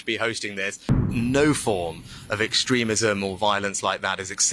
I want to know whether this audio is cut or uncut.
cut